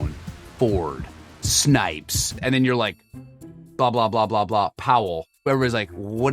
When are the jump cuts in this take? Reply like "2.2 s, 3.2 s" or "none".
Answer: 5.3 s